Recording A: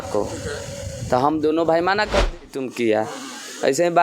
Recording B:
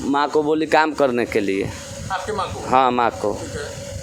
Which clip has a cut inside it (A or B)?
A